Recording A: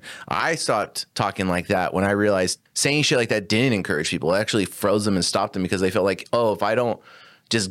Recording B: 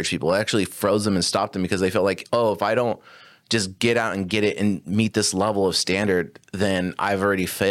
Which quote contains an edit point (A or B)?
A